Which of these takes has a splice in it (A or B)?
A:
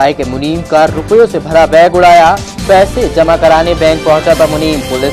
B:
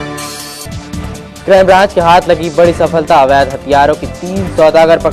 B